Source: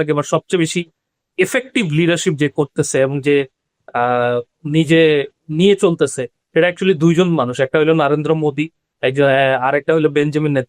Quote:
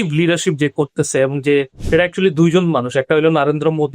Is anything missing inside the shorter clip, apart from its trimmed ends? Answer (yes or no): yes